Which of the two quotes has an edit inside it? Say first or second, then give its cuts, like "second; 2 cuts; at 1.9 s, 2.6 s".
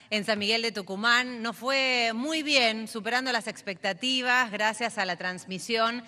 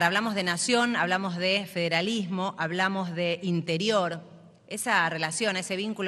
second; 1 cut; at 1.1 s